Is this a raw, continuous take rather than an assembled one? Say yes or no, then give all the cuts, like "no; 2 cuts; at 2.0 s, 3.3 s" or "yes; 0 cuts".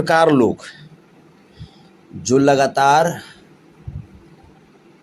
yes; 0 cuts